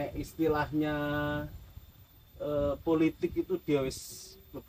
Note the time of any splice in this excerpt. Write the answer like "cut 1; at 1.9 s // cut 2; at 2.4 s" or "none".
none